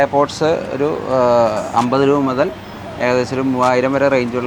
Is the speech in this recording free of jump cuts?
yes; 0 cuts

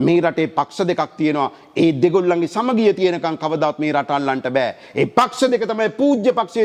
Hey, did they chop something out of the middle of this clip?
no; 0 cuts

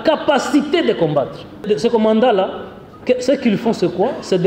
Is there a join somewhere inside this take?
yes; 1 cut; at 1.7 s

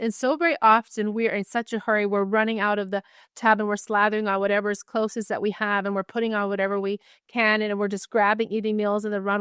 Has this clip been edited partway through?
no; 0 cuts

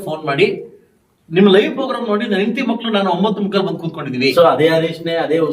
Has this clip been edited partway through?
yes; 1 cut; at 4.3 s

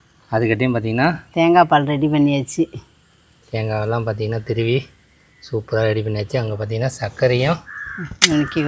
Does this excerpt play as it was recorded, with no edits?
yes; 0 cuts

